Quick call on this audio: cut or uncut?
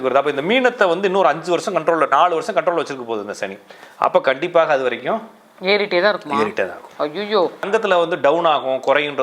cut